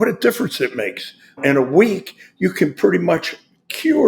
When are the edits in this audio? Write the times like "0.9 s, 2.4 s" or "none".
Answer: 1.4 s